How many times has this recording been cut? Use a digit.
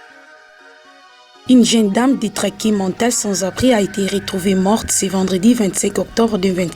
1